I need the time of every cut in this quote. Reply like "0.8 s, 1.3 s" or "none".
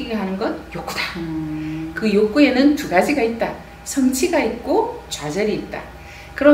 none